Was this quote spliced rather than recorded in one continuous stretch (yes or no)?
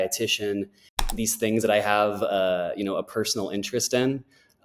yes